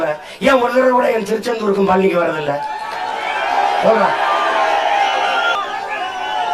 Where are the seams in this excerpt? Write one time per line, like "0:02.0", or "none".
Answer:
0:05.6